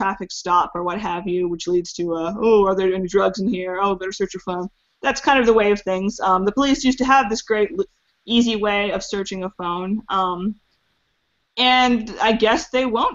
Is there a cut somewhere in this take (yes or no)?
no